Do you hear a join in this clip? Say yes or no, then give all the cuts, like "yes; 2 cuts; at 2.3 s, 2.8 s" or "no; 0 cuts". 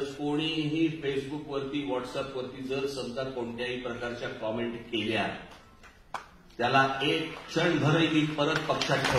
no; 0 cuts